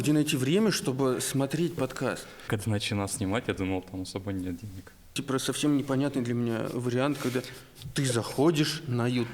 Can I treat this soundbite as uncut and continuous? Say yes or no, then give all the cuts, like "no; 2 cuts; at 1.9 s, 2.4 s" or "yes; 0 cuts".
no; 2 cuts; at 2.4 s, 5.2 s